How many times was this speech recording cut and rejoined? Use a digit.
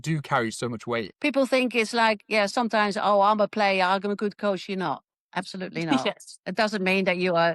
1